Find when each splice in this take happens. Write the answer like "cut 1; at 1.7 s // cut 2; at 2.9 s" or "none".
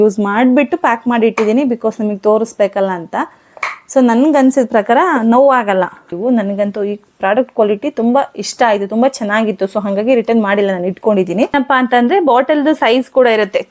cut 1; at 6.1 s // cut 2; at 11.5 s